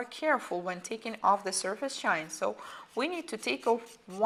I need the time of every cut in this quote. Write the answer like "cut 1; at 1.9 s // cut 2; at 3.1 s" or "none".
none